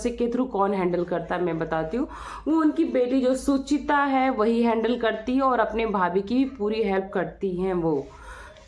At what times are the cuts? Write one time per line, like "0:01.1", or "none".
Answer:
none